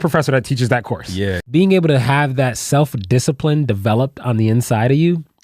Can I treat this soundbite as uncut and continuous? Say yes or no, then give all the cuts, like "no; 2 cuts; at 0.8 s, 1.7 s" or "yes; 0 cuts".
no; 1 cut; at 1.4 s